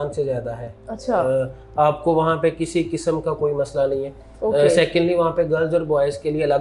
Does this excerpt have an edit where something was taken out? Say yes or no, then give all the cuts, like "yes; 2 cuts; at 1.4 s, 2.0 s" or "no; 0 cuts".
no; 0 cuts